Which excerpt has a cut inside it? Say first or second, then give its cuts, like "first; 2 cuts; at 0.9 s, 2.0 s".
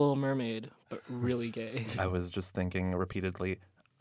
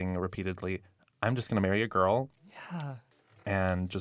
first; 1 cut; at 1.9 s